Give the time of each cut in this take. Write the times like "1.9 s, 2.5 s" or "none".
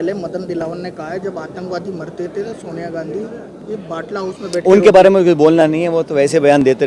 none